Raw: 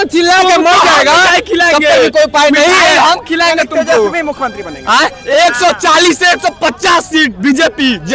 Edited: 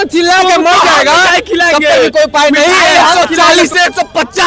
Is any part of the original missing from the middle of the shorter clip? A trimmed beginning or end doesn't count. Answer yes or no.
yes